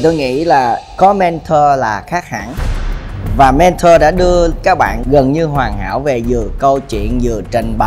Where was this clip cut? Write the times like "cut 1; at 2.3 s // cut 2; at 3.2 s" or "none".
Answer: none